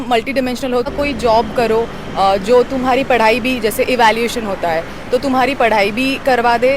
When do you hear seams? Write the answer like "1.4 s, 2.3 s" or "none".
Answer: 0.9 s